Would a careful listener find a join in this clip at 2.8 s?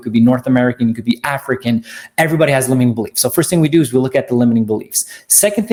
no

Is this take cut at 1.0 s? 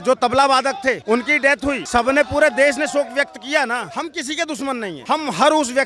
yes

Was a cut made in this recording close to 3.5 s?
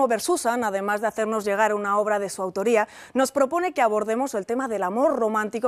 no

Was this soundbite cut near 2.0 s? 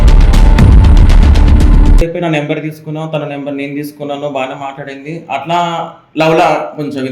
yes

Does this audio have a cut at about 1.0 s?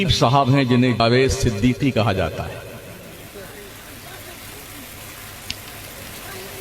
yes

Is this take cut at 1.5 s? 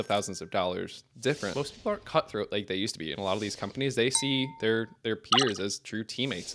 yes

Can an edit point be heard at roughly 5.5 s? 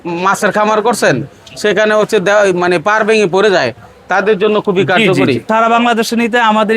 yes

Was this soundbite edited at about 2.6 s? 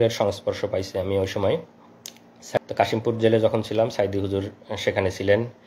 yes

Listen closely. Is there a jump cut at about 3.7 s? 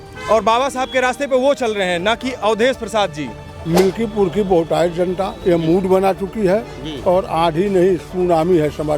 yes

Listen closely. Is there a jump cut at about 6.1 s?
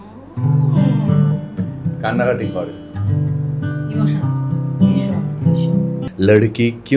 yes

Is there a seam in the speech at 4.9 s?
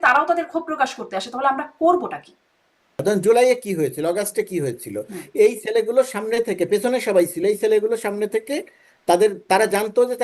no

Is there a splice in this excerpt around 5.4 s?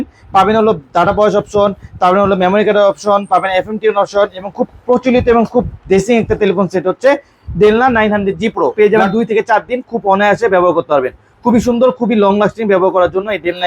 no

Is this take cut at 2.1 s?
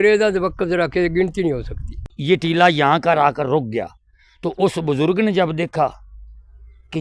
yes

